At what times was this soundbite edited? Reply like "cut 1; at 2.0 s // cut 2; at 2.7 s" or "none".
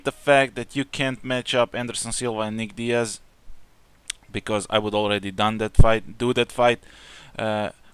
cut 1; at 7.0 s